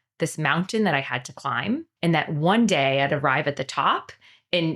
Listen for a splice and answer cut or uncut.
cut